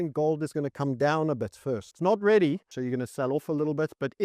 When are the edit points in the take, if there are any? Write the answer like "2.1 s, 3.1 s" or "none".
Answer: 1.9 s, 2.6 s